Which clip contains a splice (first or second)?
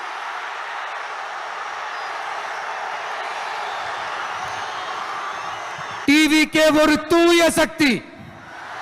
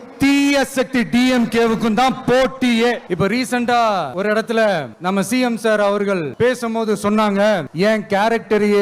second